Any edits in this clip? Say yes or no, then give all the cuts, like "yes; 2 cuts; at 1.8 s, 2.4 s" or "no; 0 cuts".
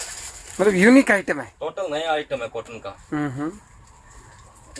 no; 0 cuts